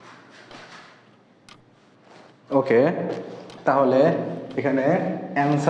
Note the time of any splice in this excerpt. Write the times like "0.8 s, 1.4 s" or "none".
1.9 s